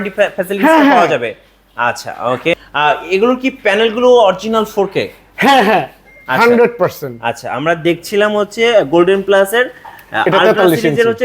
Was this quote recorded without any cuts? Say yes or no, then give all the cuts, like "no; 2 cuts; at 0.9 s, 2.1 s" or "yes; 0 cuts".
no; 1 cut; at 2.5 s